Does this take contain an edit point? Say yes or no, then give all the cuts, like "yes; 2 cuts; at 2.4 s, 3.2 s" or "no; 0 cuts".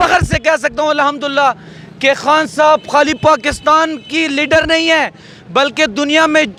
no; 0 cuts